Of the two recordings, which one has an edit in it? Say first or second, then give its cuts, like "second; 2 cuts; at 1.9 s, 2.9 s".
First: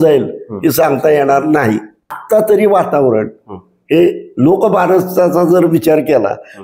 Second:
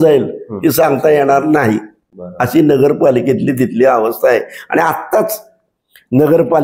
first; 1 cut; at 2.2 s